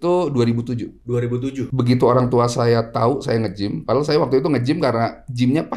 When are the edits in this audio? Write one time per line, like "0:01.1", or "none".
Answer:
0:01.6